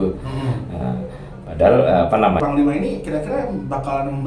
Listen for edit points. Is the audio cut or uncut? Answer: cut